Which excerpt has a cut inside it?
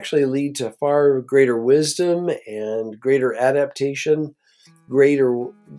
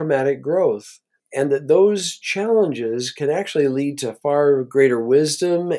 second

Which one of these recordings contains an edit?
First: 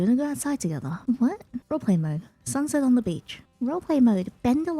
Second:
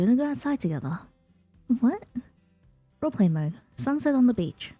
first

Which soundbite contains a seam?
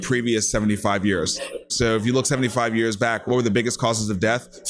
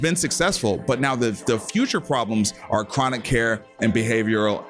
first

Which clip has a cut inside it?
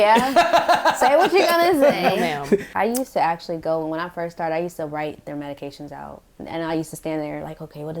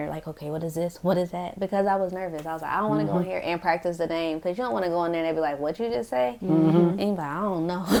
first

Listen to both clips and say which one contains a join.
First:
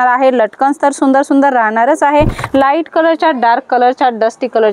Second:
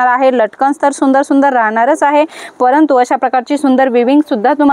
first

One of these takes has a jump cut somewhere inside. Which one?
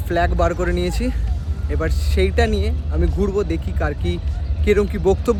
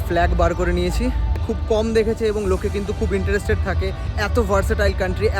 second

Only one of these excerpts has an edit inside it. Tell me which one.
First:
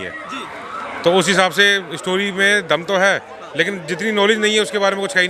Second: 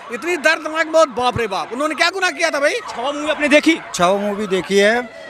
second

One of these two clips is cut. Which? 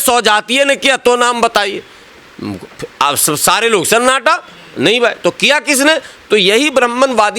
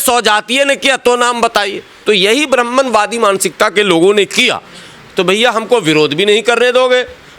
second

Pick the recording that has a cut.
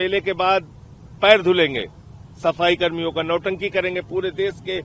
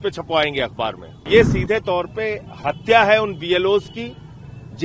second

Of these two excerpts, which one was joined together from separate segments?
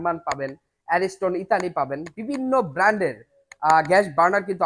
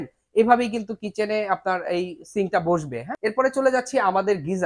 second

